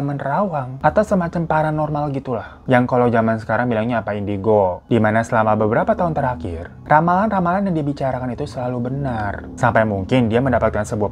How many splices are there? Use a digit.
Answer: 0